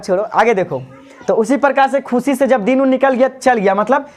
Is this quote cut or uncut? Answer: uncut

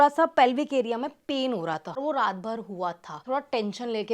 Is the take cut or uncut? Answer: cut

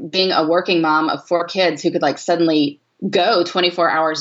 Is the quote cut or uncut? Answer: uncut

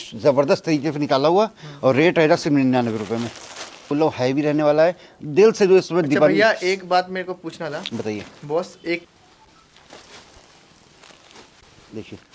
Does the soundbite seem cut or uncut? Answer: cut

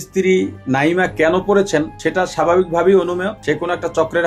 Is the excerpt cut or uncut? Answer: cut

